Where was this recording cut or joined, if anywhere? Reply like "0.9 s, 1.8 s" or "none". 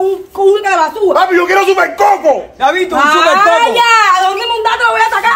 none